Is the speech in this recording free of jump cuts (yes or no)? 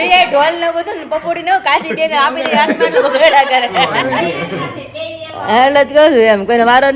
no